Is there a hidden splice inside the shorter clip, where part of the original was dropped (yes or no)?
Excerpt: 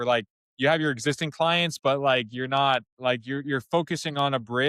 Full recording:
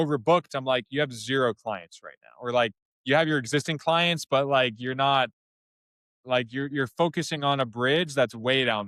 yes